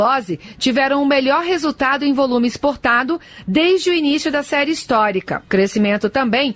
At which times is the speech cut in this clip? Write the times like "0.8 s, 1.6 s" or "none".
5.4 s